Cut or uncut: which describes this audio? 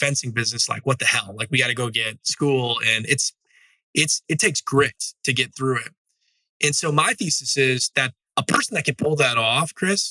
uncut